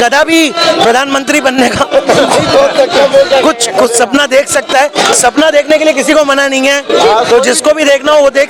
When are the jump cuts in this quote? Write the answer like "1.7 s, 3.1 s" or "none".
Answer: none